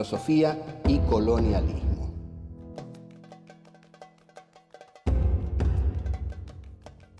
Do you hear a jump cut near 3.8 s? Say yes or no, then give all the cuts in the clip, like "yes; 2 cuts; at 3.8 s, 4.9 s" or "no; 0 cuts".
yes; 1 cut; at 3.8 s